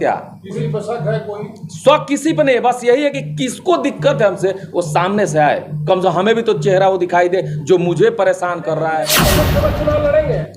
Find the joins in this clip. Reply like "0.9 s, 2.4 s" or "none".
9.2 s